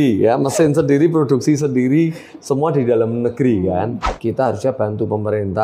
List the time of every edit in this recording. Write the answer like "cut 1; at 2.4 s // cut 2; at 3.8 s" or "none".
cut 1; at 4.1 s